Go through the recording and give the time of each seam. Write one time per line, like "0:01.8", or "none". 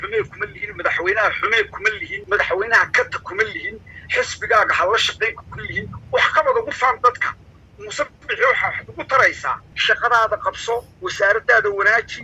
0:02.1
0:09.7